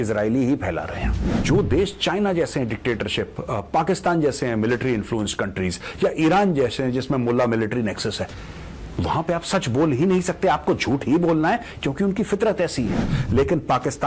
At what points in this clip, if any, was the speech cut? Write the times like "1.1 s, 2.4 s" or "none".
1.4 s, 13.1 s